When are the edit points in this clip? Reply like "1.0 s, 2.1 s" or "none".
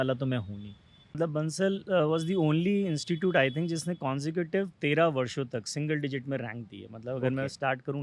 1.1 s